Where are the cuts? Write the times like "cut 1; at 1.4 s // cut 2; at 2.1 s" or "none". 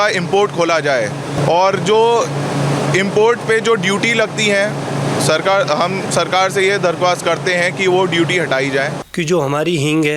cut 1; at 1.3 s // cut 2; at 9.0 s